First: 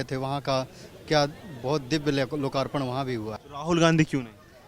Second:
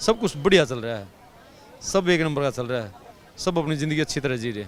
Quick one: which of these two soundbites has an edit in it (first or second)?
first